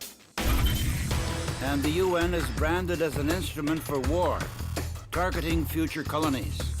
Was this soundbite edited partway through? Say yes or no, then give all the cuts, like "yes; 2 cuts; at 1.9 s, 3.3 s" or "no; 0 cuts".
yes; 1 cut; at 5.3 s